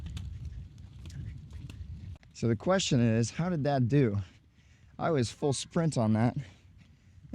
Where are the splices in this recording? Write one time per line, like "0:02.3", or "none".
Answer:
0:02.2

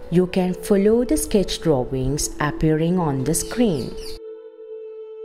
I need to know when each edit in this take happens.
0:03.9

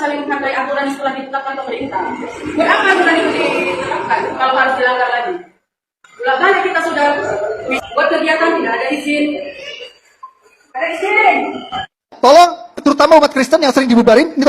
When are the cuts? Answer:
0:07.7

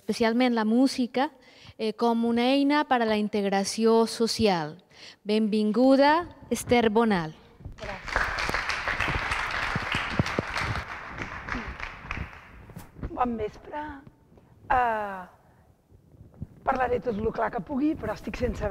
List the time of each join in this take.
0:10.0

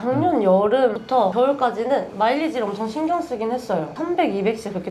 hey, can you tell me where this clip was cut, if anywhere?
0:01.2
0:04.0

